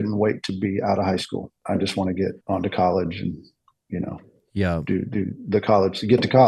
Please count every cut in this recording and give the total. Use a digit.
2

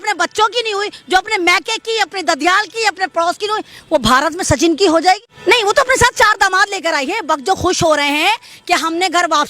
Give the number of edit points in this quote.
1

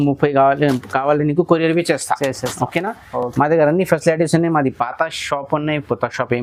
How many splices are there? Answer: 0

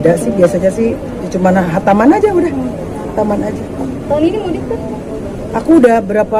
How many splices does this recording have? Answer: 0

